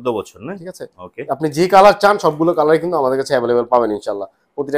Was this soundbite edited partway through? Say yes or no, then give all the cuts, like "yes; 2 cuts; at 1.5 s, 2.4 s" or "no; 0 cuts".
no; 0 cuts